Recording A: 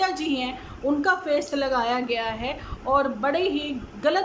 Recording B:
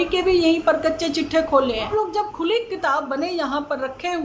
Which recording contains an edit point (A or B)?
B